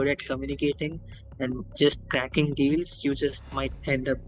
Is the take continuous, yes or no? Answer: yes